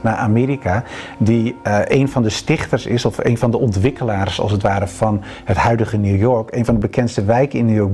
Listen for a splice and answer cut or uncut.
uncut